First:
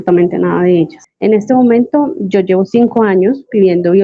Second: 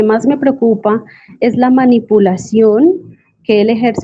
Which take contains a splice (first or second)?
first